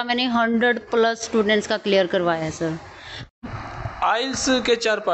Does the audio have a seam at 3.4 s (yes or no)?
yes